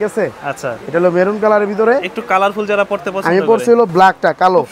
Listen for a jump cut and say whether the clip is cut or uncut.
uncut